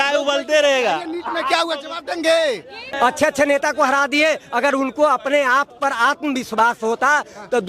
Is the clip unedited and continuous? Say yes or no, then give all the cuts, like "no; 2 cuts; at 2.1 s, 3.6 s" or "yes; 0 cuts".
no; 1 cut; at 2.8 s